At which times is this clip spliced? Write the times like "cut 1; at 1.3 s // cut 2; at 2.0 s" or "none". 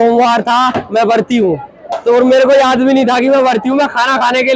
none